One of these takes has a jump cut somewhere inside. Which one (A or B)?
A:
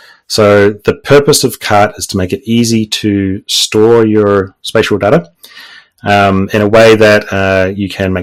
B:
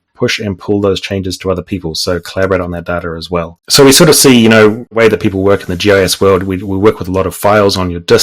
B